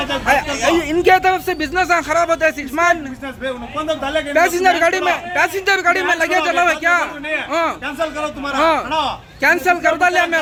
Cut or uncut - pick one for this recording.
uncut